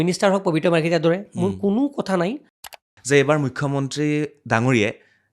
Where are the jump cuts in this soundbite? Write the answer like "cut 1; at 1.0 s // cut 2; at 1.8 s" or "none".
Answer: cut 1; at 2.6 s